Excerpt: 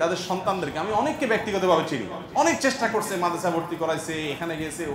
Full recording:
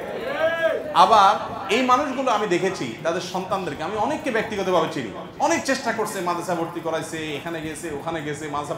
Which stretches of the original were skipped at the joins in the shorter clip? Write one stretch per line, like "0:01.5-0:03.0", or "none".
none